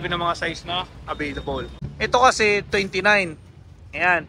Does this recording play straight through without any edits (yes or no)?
no